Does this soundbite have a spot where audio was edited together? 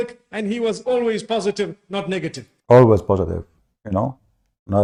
no; 0 cuts

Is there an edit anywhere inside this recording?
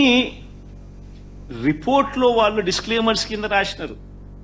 no; 0 cuts

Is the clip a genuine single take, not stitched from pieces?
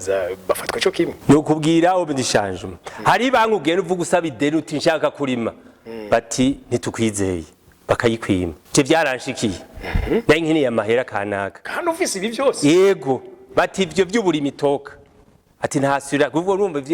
no; 2 cuts; at 1.2 s, 8.6 s

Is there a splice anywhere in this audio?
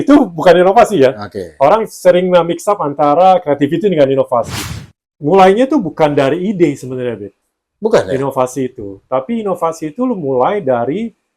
yes; 1 cut; at 4.6 s

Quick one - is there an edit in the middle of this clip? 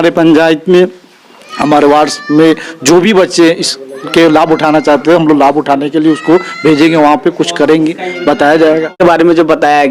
yes; 1 cut; at 9.0 s

